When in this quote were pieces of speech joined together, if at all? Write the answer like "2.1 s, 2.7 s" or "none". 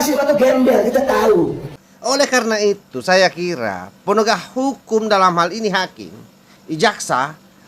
1.7 s